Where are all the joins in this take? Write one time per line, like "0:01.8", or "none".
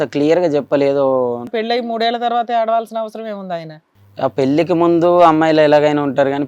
0:01.5
0:03.8